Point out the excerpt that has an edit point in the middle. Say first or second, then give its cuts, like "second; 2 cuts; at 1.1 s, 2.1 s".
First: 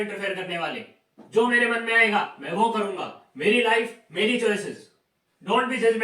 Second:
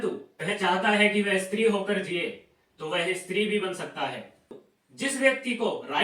second; 1 cut; at 4.6 s